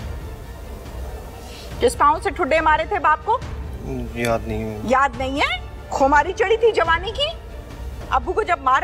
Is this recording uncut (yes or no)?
no